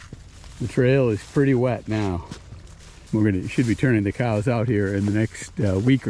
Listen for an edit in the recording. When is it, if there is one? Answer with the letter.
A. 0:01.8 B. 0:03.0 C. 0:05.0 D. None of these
B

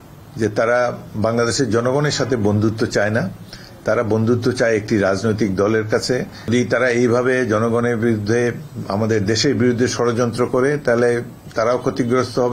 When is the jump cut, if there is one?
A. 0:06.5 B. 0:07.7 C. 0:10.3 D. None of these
A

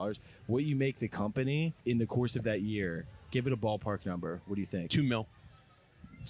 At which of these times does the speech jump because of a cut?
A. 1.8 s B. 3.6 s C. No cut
A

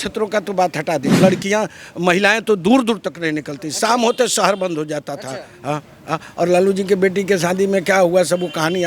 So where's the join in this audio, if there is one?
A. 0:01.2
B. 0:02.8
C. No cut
A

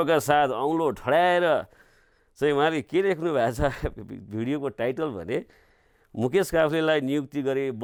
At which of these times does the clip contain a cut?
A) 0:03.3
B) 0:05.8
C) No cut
C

